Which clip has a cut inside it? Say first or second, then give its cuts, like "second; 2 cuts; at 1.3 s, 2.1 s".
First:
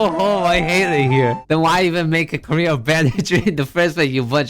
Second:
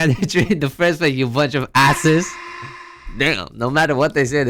first; 1 cut; at 1.4 s